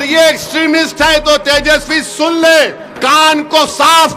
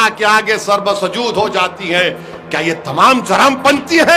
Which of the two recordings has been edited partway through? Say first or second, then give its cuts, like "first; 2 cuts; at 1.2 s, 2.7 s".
first; 1 cut; at 2.8 s